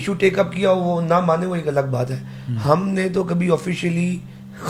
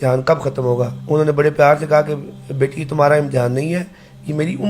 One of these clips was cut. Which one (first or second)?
second